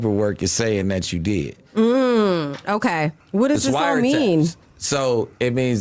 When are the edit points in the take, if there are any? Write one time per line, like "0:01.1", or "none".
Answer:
0:03.2